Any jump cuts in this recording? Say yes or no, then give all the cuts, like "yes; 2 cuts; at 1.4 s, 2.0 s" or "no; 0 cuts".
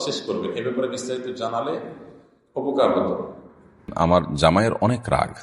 yes; 1 cut; at 3.8 s